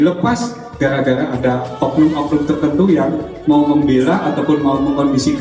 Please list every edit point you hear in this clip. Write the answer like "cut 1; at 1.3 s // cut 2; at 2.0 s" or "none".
none